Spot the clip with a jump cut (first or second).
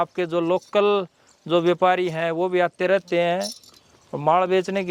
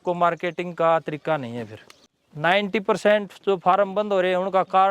second